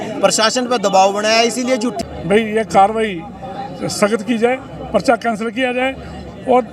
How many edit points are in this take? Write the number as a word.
one